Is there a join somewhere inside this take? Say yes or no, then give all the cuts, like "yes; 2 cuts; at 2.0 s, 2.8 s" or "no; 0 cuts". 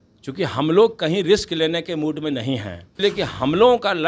yes; 1 cut; at 2.9 s